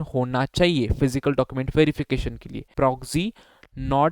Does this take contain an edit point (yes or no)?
yes